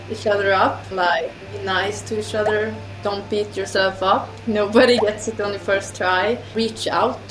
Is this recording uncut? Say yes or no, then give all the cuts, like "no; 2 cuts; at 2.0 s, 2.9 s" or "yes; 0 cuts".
no; 4 cuts; at 0.9 s, 2.9 s, 5.0 s, 6.5 s